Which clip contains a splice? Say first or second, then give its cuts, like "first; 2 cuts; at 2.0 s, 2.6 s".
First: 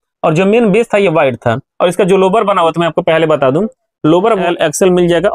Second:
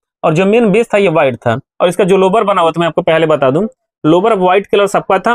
first; 1 cut; at 4.4 s